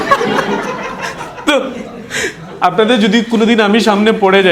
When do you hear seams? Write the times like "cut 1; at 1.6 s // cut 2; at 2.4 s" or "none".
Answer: none